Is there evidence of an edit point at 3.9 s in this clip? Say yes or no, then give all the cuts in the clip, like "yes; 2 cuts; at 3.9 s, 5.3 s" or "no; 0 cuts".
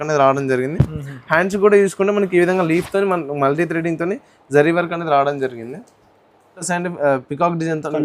no; 1 cut; at 6.7 s